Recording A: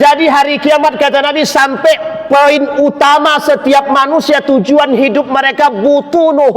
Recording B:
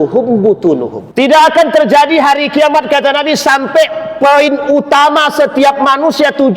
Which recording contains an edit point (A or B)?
B